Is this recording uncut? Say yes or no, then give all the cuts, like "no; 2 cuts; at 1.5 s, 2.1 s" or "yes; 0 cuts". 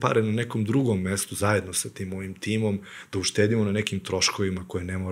yes; 0 cuts